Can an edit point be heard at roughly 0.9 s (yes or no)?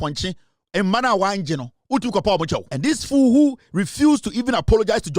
no